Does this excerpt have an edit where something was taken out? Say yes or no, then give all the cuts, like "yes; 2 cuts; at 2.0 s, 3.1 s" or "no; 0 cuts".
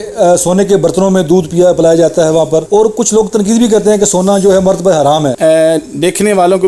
yes; 2 cuts; at 2.7 s, 5.3 s